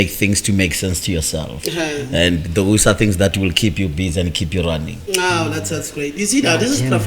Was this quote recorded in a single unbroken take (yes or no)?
yes